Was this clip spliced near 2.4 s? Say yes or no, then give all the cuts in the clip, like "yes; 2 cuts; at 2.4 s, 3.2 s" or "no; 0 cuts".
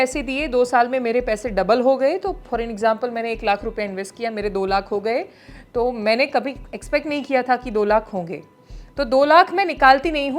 no; 0 cuts